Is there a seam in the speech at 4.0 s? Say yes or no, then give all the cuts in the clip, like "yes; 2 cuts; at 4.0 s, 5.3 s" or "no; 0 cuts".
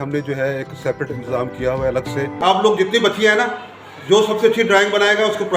no; 1 cut; at 2.4 s